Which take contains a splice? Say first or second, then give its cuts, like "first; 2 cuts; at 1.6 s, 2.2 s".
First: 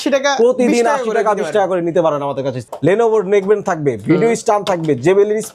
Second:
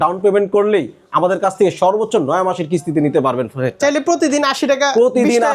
first; 1 cut; at 2.7 s